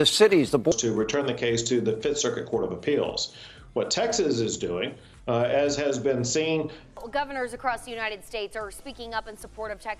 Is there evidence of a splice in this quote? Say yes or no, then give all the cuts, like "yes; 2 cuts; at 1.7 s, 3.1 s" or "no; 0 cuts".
yes; 2 cuts; at 0.7 s, 6.8 s